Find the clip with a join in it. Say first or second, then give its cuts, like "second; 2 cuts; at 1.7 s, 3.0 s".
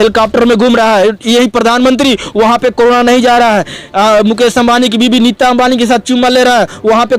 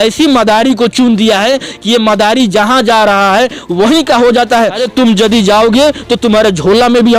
second; 1 cut; at 4.8 s